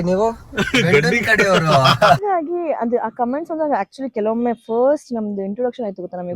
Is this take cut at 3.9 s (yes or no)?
no